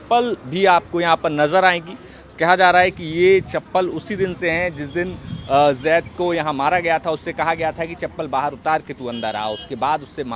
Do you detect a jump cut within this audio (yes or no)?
no